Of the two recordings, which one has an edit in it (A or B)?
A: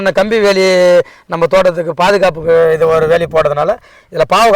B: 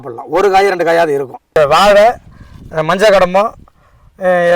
B